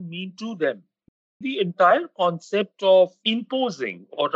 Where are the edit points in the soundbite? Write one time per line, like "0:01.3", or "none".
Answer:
0:01.4
0:03.2